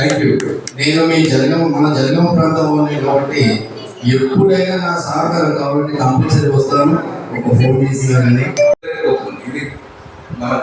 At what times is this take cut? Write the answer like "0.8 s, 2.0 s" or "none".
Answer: 8.8 s